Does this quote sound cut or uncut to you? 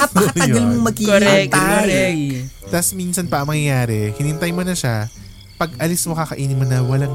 cut